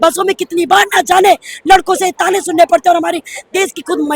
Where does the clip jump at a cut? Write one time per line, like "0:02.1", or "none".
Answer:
none